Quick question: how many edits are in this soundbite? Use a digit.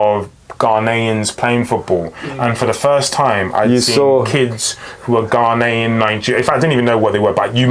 0